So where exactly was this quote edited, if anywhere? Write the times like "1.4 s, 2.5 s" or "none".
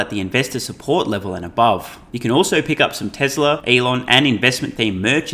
2.0 s, 3.6 s